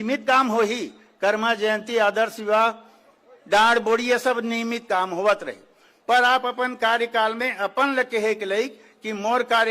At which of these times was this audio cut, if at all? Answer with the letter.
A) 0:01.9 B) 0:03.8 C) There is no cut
C